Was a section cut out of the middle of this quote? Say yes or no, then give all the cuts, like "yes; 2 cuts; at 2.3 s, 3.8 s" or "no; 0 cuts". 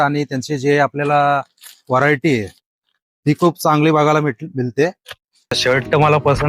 yes; 1 cut; at 5.6 s